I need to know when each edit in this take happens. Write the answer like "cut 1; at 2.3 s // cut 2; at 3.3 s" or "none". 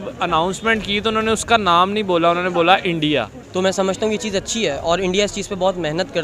cut 1; at 3.4 s

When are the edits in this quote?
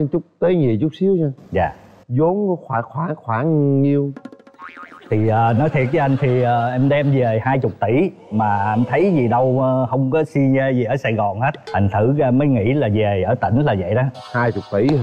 none

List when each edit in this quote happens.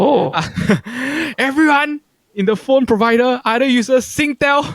none

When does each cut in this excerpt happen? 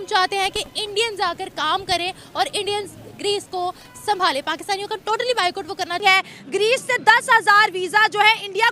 cut 1; at 6.0 s

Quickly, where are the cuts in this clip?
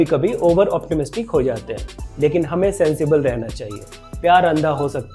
none

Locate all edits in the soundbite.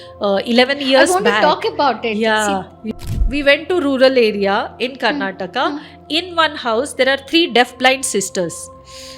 cut 1; at 2.8 s

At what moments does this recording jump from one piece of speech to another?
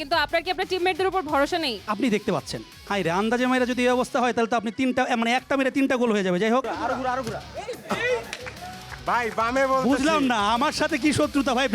cut 1; at 1.8 s // cut 2; at 6.7 s

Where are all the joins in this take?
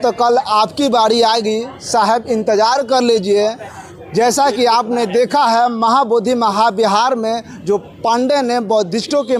none

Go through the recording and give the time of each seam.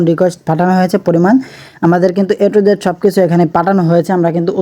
none

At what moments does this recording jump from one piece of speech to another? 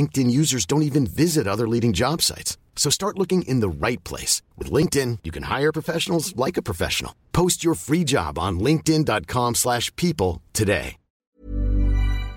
cut 1; at 11.4 s

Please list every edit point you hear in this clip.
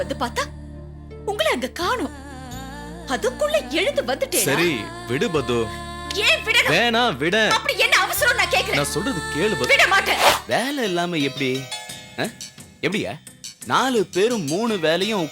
cut 1; at 10.3 s

